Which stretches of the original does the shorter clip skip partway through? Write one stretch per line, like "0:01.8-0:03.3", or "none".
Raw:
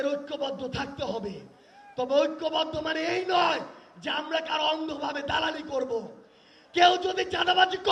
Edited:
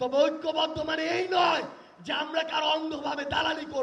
none